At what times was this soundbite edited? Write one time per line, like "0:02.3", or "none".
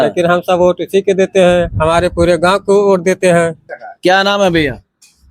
0:03.6